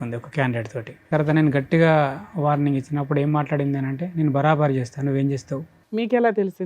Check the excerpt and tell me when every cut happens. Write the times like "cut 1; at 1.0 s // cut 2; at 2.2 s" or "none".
cut 1; at 1.1 s // cut 2; at 5.8 s